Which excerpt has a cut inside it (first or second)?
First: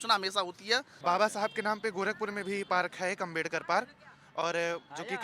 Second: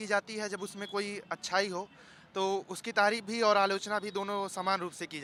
first